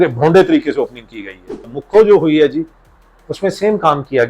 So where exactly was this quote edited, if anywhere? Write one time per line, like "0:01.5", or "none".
0:01.7